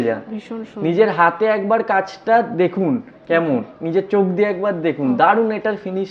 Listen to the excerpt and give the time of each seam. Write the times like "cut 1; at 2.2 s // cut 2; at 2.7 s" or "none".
none